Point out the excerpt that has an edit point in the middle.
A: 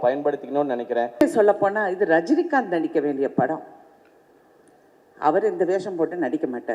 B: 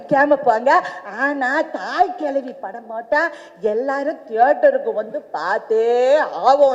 A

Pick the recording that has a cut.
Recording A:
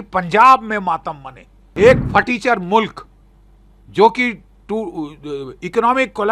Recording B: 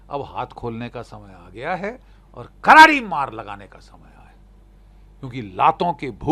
A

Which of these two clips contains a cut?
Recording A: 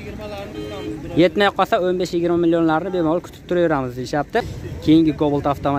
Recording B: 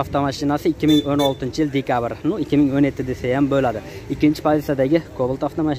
A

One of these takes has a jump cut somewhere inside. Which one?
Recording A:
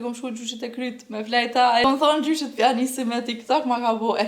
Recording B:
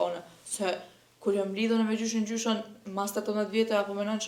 A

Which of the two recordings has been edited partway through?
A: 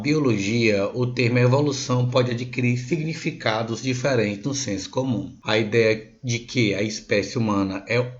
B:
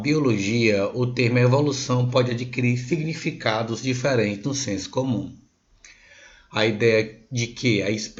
A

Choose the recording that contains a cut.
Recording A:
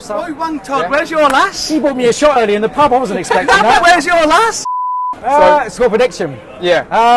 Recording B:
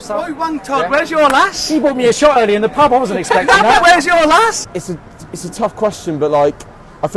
B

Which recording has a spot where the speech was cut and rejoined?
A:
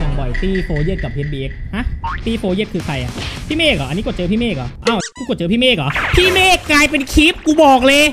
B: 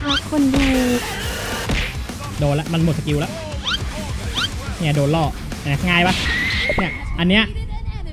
A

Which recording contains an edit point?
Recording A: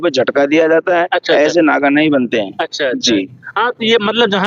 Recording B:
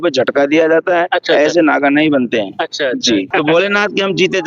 B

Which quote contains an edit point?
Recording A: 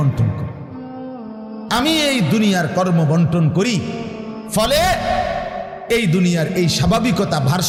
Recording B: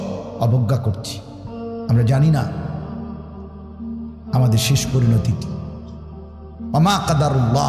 B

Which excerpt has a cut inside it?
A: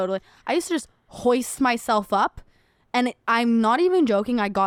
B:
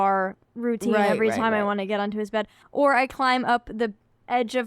B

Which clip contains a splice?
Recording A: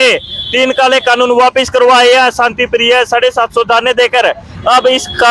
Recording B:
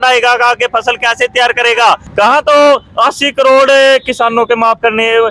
B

